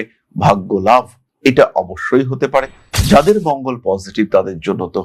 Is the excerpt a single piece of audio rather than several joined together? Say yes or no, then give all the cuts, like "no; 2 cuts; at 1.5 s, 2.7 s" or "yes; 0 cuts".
yes; 0 cuts